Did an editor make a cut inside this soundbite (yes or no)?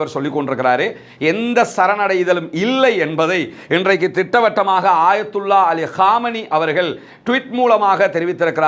no